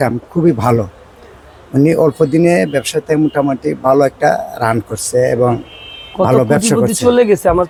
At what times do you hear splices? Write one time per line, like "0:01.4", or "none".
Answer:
none